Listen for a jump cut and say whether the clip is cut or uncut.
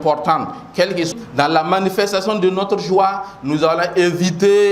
cut